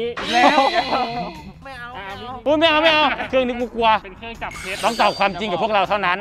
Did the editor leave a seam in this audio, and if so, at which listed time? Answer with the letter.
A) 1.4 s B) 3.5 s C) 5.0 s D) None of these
D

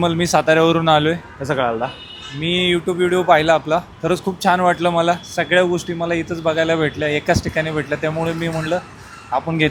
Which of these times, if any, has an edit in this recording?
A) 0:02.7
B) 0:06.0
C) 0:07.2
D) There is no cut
D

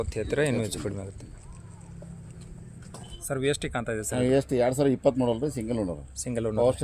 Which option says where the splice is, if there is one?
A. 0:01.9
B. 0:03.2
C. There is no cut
B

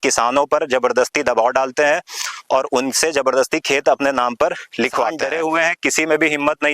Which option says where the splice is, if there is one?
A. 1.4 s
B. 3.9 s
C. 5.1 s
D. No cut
C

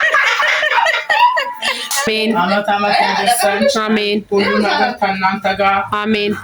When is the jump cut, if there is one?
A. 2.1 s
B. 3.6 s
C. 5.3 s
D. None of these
A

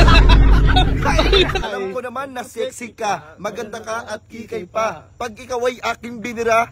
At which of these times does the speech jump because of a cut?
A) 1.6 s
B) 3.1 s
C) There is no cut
A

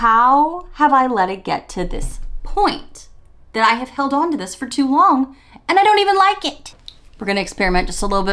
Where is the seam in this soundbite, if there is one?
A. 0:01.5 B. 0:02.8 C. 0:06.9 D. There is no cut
D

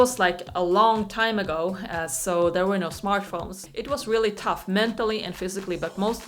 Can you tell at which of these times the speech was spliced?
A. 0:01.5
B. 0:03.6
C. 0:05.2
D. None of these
B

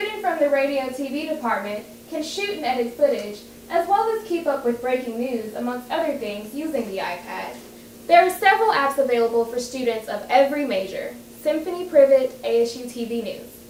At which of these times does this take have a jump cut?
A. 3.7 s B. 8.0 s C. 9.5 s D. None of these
D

